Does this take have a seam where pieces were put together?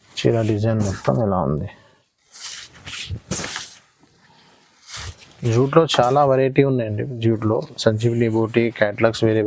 no; 0 cuts

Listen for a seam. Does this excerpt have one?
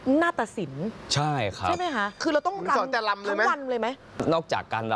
yes; 2 cuts; at 2.2 s, 4.0 s

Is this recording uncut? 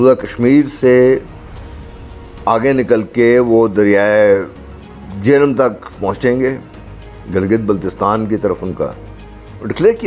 yes; 0 cuts

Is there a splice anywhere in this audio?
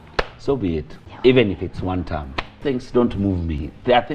yes; 2 cuts; at 1.0 s, 2.6 s

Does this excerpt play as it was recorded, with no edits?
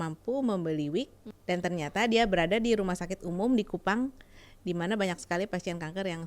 no; 1 cut; at 1.2 s

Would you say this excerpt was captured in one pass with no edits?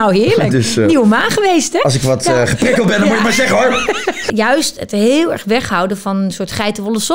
no; 1 cut; at 4.2 s

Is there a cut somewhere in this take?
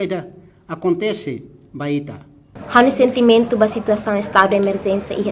yes; 1 cut; at 2.5 s

